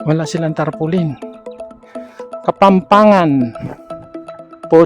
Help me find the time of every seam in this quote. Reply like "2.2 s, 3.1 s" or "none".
1.1 s, 2.4 s